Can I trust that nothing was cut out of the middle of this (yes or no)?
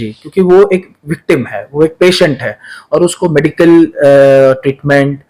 yes